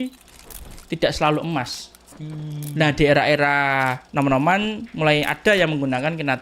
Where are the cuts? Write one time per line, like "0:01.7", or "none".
none